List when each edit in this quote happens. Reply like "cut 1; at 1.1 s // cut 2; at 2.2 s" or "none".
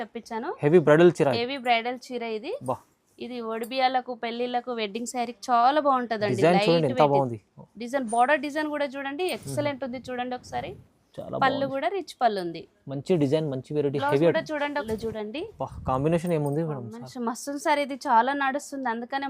cut 1; at 14.9 s